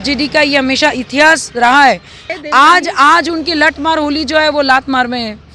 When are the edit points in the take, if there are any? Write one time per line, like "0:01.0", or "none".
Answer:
0:02.3